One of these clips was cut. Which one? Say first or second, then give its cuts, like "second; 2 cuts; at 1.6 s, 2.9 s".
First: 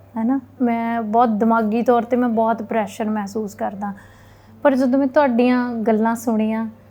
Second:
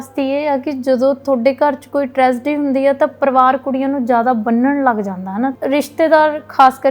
second; 1 cut; at 5.5 s